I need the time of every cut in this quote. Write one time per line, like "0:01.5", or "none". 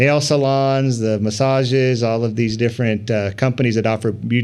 none